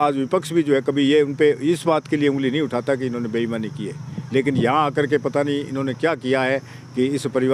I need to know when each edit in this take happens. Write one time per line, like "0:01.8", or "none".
none